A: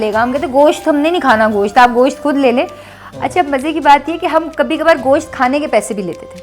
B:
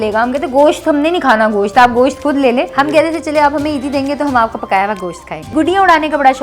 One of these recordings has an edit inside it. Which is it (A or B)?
B